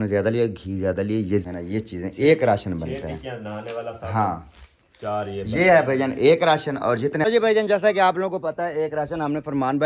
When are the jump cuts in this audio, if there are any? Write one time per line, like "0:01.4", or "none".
0:01.5
0:07.0